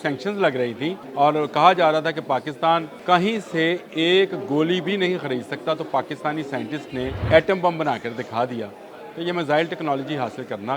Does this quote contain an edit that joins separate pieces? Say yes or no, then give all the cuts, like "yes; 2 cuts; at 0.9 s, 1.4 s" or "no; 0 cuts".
yes; 3 cuts; at 1.0 s, 2.9 s, 7.2 s